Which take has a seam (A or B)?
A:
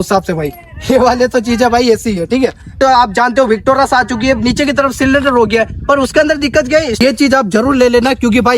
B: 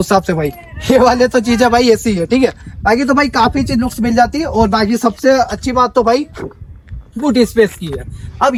A